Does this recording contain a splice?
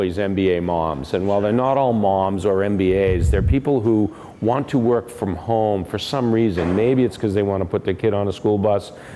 no; 0 cuts

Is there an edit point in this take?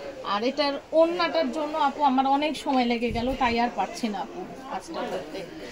no; 0 cuts

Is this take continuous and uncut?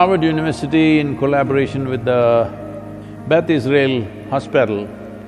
yes; 0 cuts

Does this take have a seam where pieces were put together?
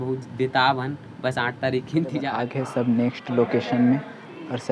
yes; 1 cut; at 2.4 s

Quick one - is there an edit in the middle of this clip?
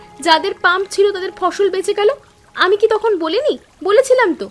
no; 0 cuts

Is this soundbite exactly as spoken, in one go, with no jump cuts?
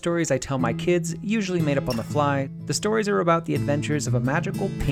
no; 1 cut; at 2.6 s

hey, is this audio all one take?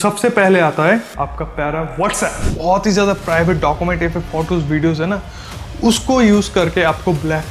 no; 1 cut; at 2.4 s

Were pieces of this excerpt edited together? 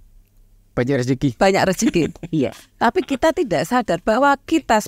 no; 0 cuts

